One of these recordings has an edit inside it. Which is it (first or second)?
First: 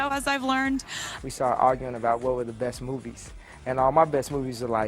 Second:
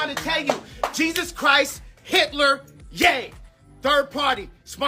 first